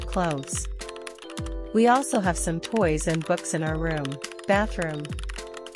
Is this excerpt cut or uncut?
cut